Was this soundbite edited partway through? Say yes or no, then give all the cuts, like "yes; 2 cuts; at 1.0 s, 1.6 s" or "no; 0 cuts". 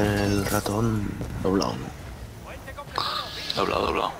no; 0 cuts